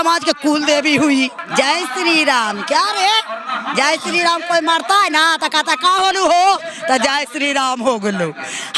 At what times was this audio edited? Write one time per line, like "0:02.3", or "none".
0:01.4